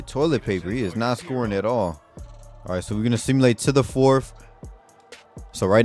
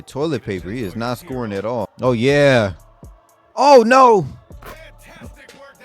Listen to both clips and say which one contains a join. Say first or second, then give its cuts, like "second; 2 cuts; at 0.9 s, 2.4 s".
second; 1 cut; at 1.9 s